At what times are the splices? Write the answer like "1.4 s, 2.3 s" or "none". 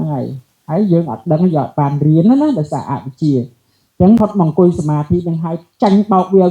4.2 s